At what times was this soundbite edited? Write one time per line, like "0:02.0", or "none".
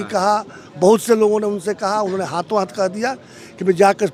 none